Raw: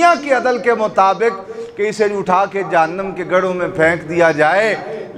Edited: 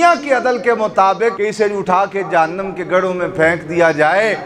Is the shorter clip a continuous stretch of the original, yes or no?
no